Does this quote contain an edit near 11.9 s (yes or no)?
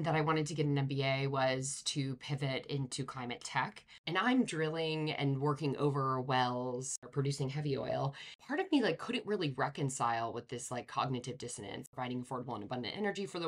yes